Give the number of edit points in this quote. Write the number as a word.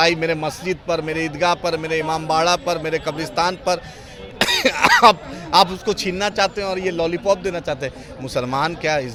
zero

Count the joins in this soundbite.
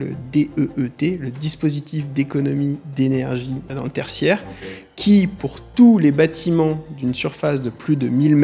one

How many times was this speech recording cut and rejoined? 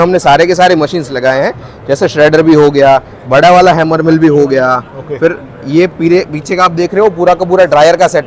zero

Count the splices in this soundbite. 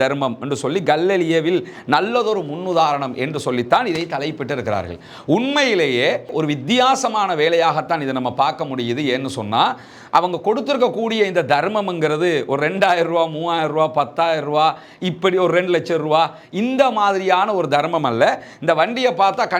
zero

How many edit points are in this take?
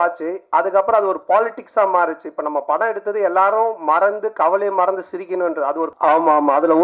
one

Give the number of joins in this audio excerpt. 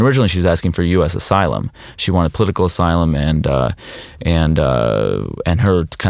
zero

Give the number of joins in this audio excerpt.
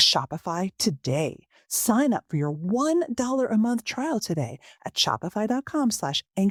zero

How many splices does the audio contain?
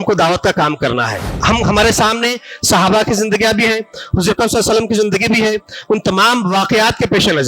one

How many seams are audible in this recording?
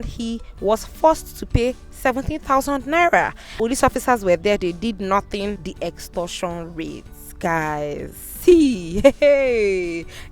two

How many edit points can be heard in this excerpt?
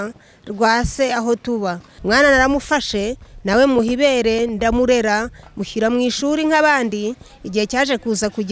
one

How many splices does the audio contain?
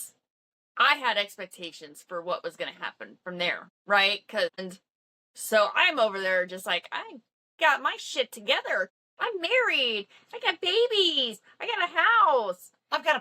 three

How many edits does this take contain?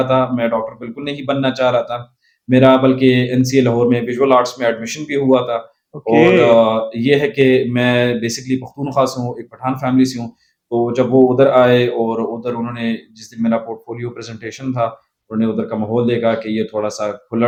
zero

